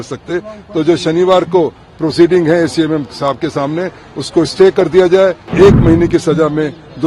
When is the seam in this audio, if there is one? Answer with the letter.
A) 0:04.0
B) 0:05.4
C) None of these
B